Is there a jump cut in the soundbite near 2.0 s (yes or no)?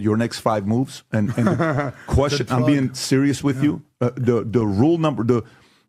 no